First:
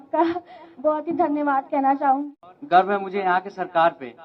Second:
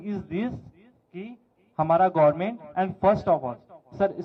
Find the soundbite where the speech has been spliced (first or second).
first